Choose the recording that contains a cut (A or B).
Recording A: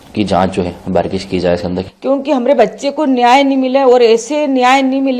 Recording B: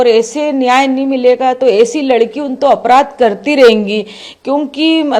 A